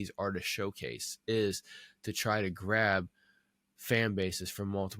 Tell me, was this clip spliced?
no; 0 cuts

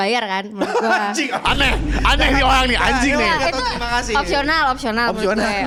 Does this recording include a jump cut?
no; 0 cuts

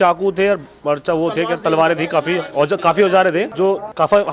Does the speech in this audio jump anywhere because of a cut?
no; 0 cuts

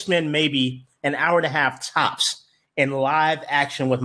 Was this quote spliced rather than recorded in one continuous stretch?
no; 0 cuts

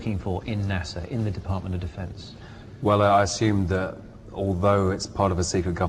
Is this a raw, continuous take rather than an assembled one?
no; 1 cut; at 0.9 s

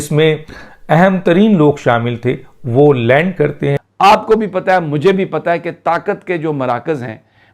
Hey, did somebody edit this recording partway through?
yes; 1 cut; at 3.8 s

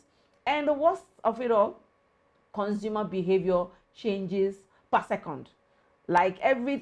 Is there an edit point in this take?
no; 0 cuts

